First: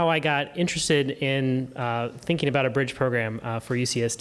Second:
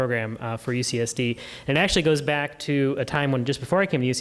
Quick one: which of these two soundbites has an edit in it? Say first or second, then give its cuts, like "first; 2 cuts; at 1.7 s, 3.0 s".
first; 1 cut; at 1.7 s